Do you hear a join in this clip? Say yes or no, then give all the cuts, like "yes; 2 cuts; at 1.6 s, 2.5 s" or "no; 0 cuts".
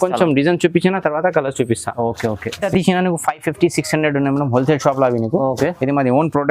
yes; 1 cut; at 2.6 s